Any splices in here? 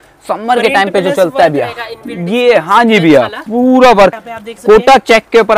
yes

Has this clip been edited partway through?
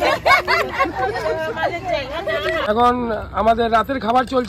yes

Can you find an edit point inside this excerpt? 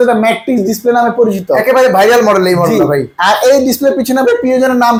no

